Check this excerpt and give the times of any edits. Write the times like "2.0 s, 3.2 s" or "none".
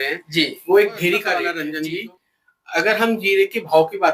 1.6 s